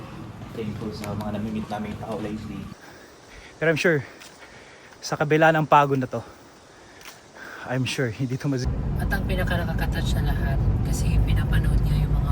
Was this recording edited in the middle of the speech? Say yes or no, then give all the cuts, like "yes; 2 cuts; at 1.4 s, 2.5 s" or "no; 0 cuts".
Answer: yes; 2 cuts; at 2.7 s, 8.7 s